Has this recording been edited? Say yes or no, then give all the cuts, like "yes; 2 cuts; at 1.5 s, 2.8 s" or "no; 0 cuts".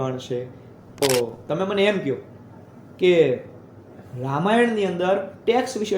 yes; 1 cut; at 1.0 s